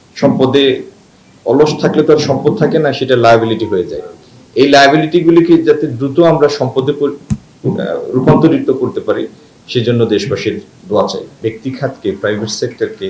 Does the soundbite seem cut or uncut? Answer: cut